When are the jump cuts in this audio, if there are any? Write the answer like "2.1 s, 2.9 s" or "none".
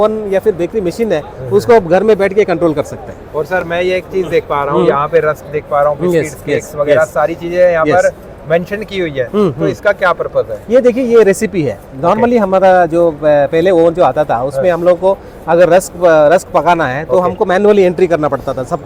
none

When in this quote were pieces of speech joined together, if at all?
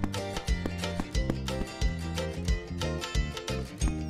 none

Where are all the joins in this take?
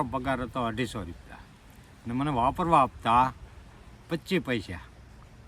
none

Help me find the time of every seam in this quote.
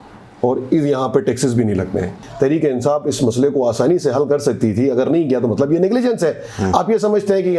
2.2 s

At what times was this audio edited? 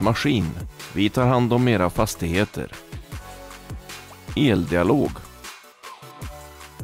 5.2 s

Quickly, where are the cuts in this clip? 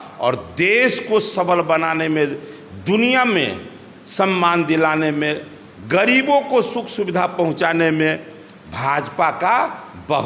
none

